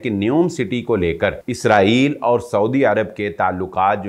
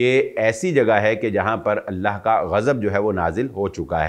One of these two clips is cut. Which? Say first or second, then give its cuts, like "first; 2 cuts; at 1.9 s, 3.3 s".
first; 1 cut; at 1.5 s